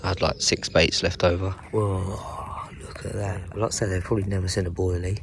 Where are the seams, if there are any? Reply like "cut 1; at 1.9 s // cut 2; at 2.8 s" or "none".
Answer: cut 1; at 1.6 s // cut 2; at 3.5 s